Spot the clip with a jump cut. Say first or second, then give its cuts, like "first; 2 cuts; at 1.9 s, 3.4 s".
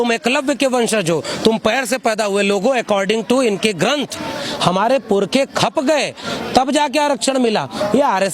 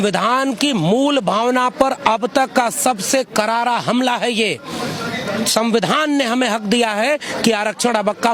first; 1 cut; at 4.4 s